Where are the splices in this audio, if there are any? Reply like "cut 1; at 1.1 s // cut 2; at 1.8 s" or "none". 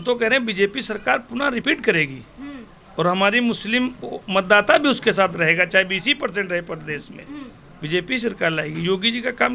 cut 1; at 1.6 s

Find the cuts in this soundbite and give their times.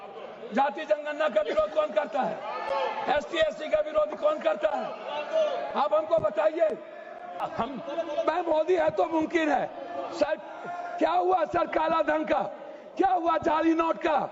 cut 1; at 7.5 s

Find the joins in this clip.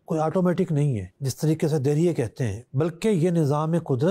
cut 1; at 1.1 s

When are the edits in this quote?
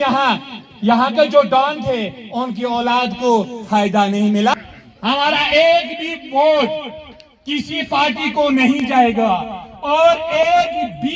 cut 1; at 4.5 s

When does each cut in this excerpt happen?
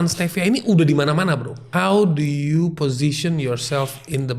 cut 1; at 1.6 s

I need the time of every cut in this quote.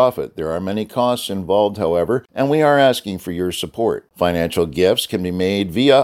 cut 1; at 2.3 s

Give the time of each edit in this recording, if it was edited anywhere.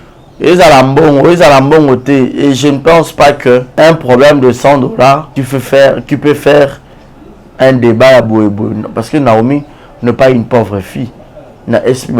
cut 1; at 3.7 s // cut 2; at 5.3 s

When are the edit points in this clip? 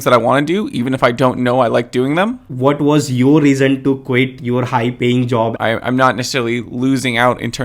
cut 1; at 2.5 s // cut 2; at 5.6 s

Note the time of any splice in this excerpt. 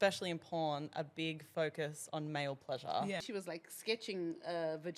cut 1; at 3.2 s

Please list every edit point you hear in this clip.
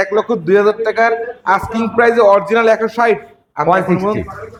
none

